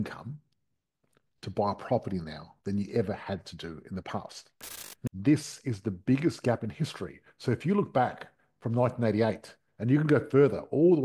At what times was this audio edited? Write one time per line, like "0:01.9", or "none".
0:05.1